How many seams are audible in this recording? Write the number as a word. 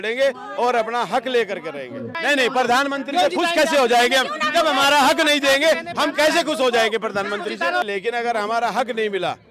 two